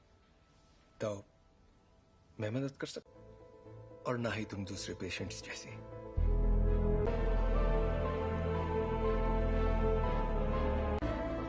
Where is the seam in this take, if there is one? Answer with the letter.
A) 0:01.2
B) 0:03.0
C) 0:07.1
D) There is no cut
C